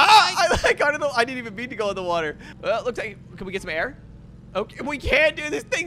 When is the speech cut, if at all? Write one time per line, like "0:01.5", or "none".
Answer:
0:02.5